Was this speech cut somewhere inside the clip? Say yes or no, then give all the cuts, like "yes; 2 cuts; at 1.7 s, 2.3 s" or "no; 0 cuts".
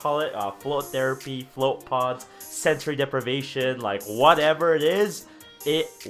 no; 0 cuts